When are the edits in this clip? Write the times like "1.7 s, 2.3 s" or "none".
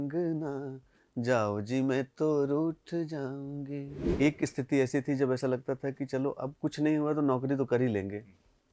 4.0 s